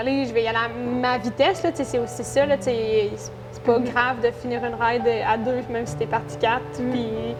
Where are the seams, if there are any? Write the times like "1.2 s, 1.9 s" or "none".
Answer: none